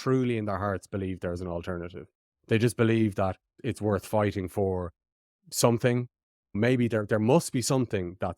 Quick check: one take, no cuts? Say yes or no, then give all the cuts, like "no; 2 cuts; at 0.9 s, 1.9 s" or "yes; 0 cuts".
no; 1 cut; at 3.5 s